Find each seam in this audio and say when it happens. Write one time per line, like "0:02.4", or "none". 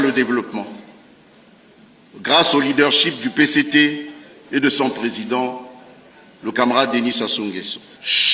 none